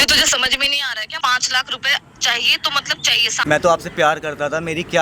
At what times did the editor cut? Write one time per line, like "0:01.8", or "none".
0:01.1
0:03.3